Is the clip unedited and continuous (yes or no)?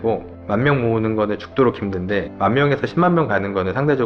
yes